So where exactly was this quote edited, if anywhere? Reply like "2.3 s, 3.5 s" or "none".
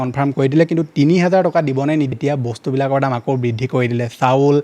2.1 s

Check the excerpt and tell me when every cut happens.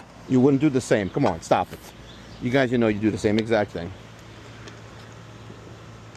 none

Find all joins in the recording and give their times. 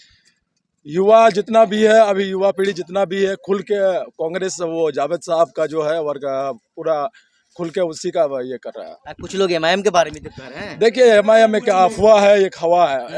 none

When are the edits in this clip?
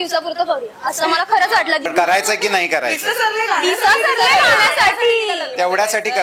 1.9 s

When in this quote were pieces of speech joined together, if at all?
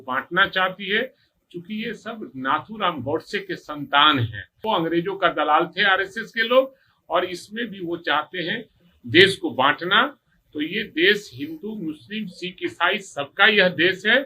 4.6 s

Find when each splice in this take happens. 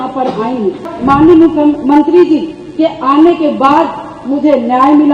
0.9 s

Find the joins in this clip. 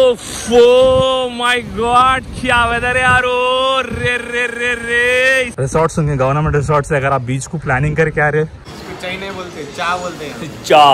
5.5 s, 8.5 s

